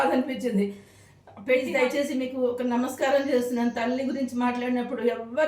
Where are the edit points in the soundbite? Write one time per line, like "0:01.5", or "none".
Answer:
0:01.7